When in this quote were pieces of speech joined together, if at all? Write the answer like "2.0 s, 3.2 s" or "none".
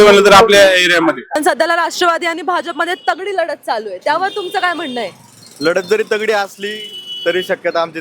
1.3 s

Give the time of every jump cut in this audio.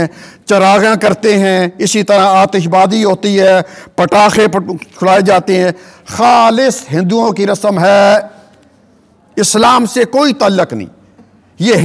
none

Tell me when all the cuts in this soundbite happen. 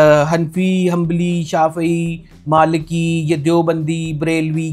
none

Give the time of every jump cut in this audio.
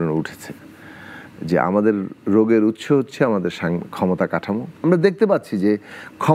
4.8 s

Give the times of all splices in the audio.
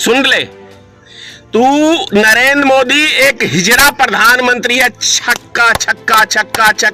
none

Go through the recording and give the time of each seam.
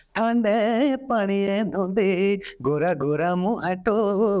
none

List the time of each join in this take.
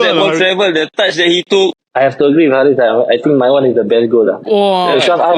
none

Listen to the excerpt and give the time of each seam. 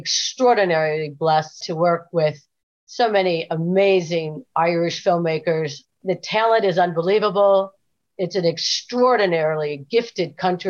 1.6 s, 5.8 s

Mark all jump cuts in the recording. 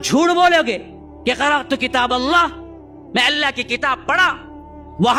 none

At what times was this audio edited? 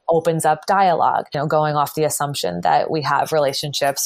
1.3 s

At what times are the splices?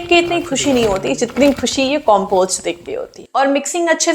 3.2 s

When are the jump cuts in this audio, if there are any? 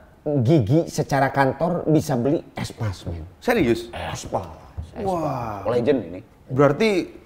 none

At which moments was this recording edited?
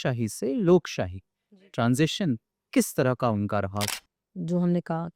3.9 s

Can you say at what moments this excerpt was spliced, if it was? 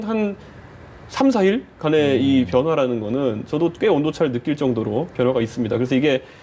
none

